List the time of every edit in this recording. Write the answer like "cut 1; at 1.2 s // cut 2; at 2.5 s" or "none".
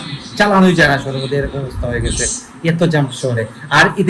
none